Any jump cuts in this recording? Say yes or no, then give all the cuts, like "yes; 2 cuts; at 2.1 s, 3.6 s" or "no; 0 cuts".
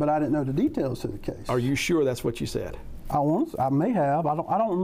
no; 0 cuts